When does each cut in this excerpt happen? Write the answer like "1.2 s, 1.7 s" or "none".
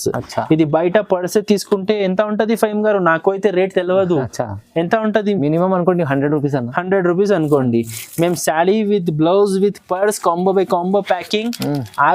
none